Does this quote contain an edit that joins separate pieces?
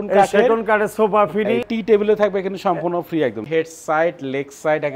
yes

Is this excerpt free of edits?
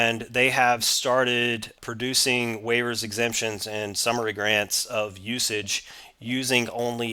yes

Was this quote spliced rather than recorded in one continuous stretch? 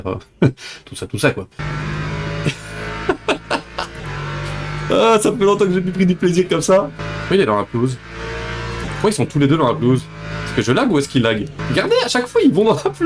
yes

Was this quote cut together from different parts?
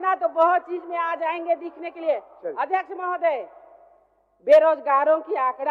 no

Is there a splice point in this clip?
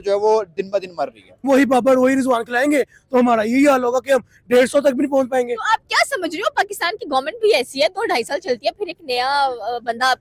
no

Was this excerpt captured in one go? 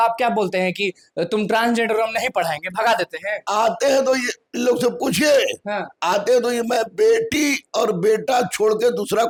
yes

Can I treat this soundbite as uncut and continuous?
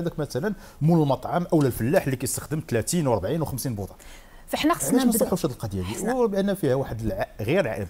yes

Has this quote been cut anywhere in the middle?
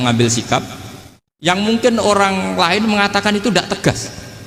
no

